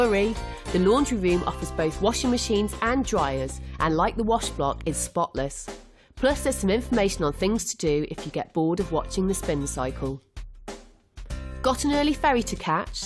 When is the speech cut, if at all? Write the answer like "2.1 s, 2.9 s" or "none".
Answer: none

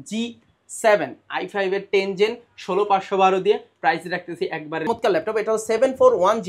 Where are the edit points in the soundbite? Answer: 4.9 s

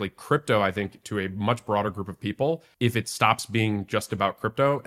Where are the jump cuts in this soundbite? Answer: 2.7 s

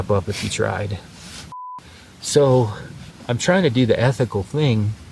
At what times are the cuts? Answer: 1.7 s

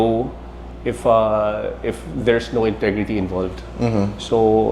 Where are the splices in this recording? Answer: none

